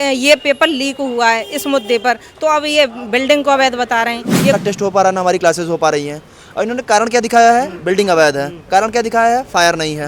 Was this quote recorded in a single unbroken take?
no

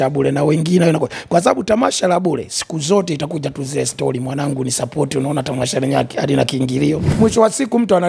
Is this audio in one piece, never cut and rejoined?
no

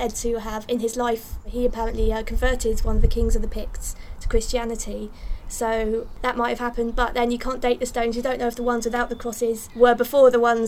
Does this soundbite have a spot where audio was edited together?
yes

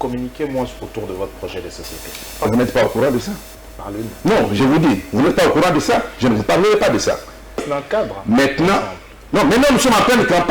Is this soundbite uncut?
no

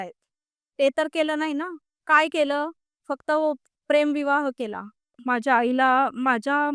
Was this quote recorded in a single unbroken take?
no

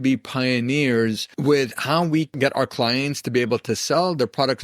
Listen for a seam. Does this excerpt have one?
yes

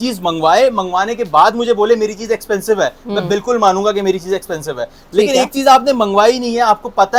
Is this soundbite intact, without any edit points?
yes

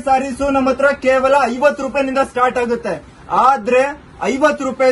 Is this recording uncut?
yes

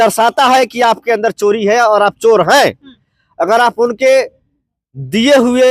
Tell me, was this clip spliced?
no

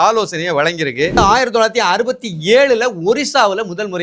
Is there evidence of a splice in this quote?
yes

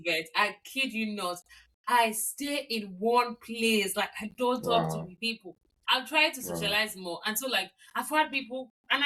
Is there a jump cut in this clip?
no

